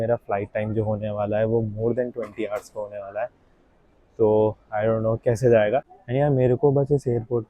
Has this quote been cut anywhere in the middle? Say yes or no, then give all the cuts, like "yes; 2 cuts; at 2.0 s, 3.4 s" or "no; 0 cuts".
yes; 1 cut; at 5.9 s